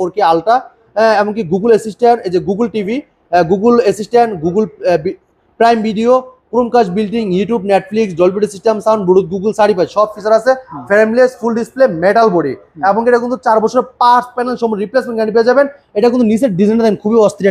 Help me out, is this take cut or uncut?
uncut